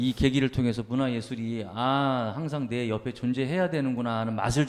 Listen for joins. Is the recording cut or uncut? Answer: uncut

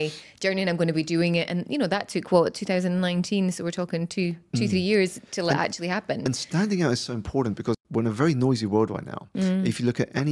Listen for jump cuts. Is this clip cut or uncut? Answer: cut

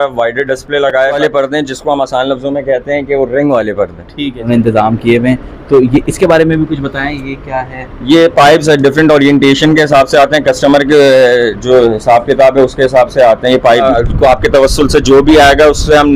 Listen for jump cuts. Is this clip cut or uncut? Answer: cut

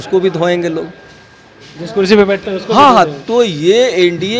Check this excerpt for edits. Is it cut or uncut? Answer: uncut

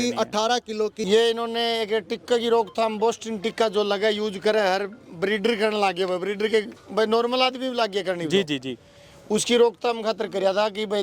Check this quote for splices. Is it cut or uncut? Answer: cut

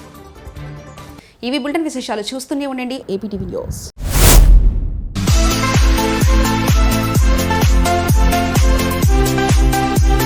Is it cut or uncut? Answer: uncut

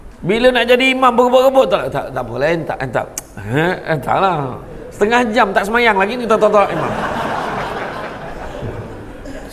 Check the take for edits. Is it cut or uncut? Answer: uncut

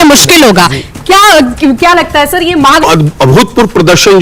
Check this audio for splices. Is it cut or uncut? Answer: cut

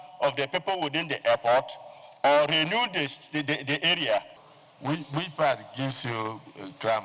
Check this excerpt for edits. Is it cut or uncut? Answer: cut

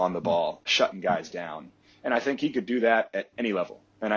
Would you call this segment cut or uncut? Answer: uncut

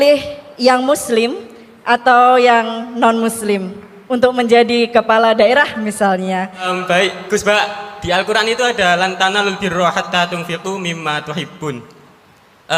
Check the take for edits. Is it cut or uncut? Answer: cut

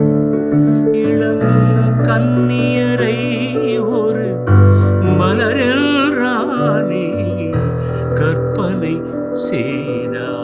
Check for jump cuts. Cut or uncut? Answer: uncut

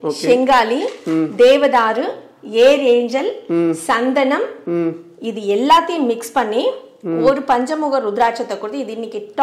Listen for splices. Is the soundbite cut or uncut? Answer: uncut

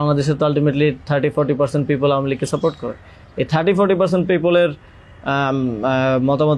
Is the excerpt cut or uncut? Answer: uncut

